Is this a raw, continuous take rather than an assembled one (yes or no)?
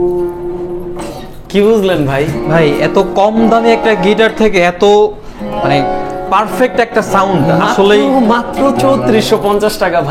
yes